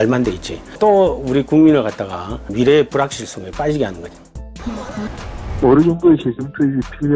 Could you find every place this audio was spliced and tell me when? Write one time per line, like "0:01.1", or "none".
0:05.1